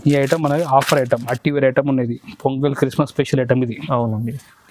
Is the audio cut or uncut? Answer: cut